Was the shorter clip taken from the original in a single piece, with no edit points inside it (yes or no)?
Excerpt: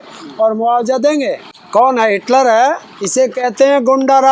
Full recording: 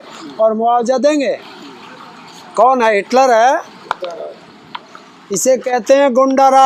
no